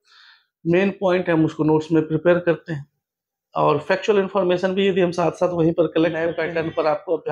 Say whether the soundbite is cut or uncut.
cut